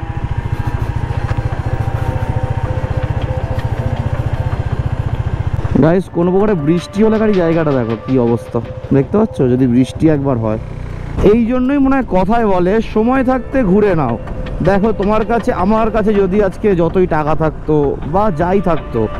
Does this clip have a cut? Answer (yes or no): yes